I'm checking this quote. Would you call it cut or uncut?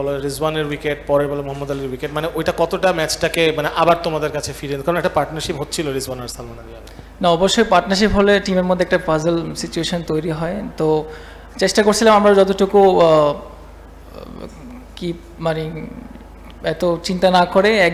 uncut